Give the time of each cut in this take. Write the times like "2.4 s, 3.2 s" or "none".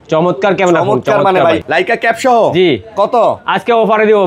1.7 s